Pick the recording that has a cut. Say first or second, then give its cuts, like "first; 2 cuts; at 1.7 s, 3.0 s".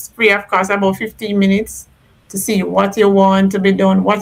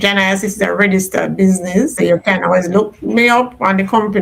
second; 1 cut; at 2.0 s